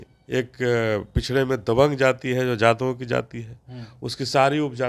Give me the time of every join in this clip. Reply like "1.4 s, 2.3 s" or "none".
none